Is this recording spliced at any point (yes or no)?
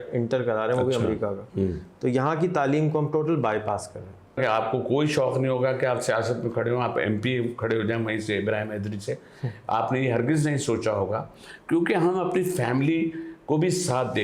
yes